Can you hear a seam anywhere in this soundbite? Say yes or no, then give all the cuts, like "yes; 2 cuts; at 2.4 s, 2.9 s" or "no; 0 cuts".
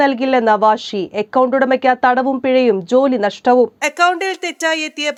no; 0 cuts